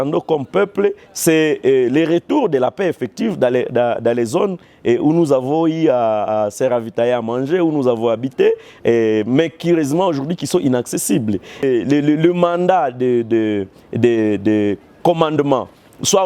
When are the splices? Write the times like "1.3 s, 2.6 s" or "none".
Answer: 11.6 s